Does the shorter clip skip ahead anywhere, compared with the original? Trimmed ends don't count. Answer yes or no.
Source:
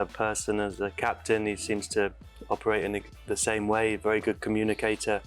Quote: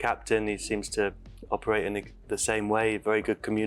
no